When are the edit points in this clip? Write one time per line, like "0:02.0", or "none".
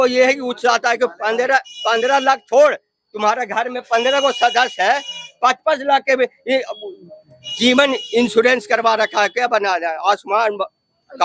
none